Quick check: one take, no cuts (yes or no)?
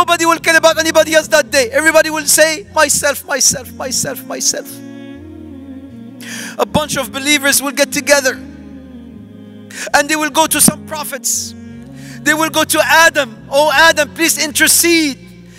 no